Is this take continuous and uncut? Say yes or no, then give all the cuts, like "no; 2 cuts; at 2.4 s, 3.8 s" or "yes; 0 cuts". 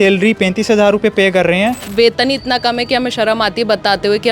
no; 1 cut; at 1.9 s